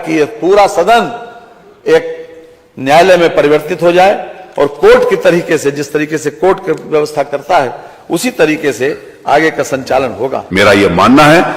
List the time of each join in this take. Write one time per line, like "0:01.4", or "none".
0:10.4